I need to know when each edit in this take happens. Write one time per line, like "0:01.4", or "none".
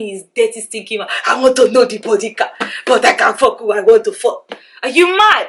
none